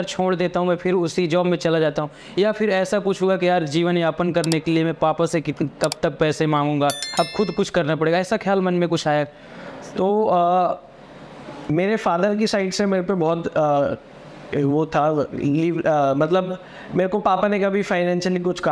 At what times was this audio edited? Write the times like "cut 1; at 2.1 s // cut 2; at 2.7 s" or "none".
none